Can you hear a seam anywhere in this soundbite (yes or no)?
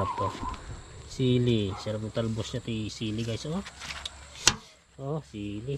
no